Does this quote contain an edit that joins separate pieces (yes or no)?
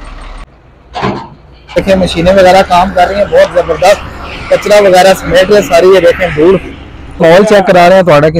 yes